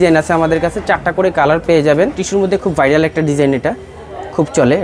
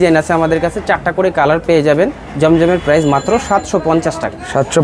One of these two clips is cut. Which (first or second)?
first